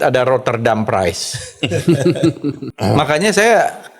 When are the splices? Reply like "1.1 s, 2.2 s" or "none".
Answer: 2.7 s